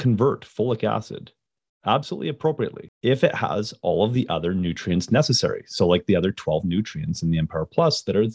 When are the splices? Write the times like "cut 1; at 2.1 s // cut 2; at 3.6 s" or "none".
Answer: cut 1; at 2.9 s